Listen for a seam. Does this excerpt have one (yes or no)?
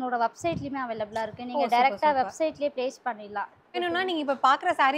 no